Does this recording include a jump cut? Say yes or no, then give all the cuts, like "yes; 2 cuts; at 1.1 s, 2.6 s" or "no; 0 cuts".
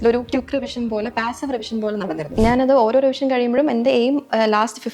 yes; 1 cut; at 2.3 s